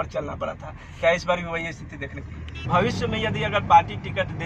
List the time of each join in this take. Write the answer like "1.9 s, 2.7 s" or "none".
2.6 s